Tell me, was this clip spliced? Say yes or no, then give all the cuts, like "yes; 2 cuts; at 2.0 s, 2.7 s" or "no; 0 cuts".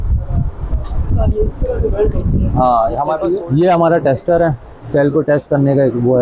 yes; 1 cut; at 3.2 s